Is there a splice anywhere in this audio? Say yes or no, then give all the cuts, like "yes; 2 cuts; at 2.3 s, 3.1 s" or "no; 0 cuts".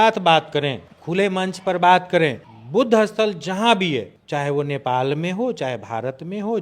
yes; 1 cut; at 4.2 s